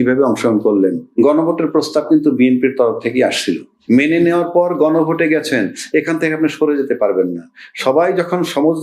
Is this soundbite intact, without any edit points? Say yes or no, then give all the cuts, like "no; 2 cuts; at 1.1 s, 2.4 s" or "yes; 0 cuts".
no; 2 cuts; at 1.1 s, 3.7 s